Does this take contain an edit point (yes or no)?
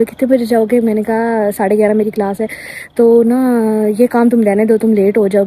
no